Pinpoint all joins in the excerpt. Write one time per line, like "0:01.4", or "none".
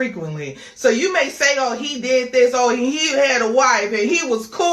0:00.9